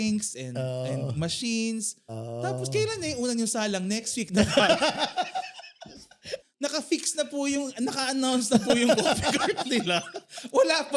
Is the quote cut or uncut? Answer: cut